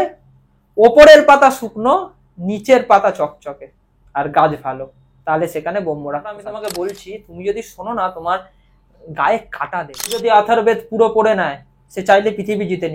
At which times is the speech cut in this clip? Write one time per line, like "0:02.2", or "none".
0:06.5
0:10.2